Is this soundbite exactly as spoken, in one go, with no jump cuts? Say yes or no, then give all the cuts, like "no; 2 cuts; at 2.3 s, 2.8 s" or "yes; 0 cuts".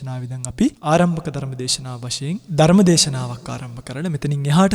no; 2 cuts; at 0.8 s, 2.5 s